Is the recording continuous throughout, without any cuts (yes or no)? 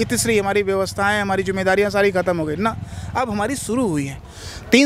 yes